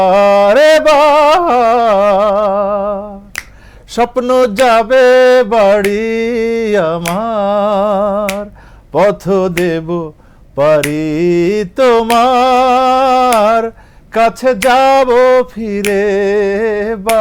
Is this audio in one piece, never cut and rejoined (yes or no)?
yes